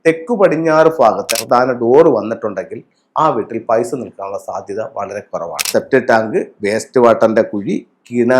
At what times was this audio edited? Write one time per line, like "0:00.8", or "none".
0:01.3
0:05.6